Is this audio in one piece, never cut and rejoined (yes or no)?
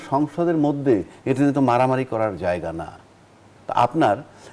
yes